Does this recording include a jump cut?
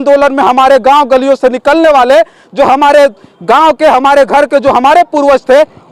no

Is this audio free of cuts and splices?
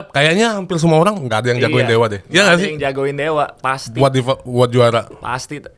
yes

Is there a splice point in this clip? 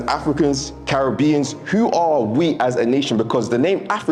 no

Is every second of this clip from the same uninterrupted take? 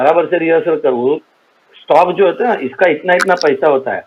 yes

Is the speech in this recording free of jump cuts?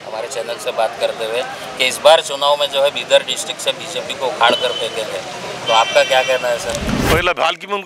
yes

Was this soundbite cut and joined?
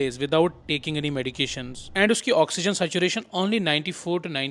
no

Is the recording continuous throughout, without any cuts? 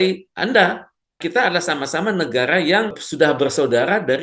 no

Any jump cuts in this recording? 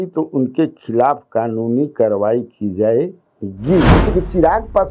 yes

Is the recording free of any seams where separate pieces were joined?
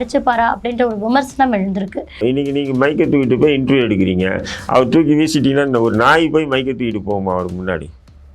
no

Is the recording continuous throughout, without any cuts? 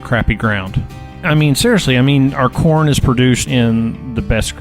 no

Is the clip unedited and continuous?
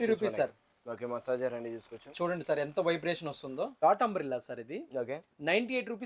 no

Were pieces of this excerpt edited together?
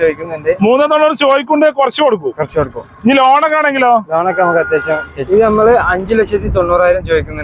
yes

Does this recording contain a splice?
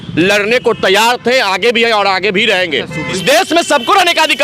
yes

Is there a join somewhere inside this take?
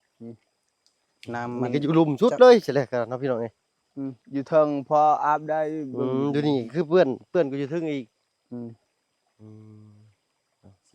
no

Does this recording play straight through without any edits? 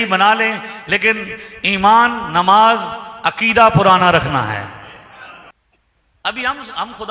no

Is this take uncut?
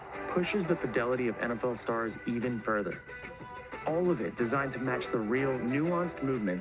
yes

